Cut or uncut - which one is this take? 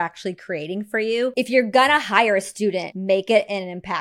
cut